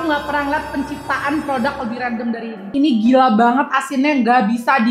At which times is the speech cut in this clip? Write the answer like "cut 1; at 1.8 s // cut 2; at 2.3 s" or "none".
cut 1; at 2.6 s